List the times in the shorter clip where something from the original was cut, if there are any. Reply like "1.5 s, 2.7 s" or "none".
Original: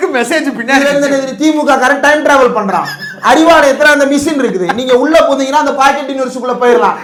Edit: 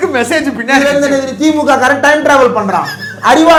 none